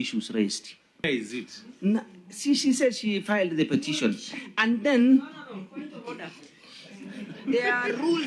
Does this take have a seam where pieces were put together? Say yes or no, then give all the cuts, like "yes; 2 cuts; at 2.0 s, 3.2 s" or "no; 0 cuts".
yes; 1 cut; at 1.0 s